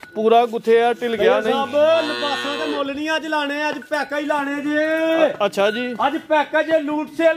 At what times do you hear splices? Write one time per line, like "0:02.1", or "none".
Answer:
none